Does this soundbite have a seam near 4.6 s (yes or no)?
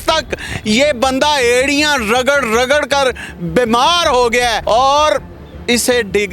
yes